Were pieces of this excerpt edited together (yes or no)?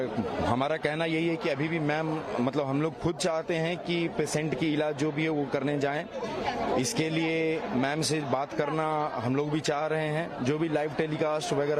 no